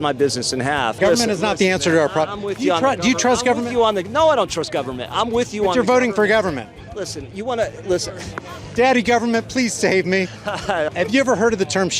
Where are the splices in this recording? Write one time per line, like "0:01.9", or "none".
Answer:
0:00.9
0:10.9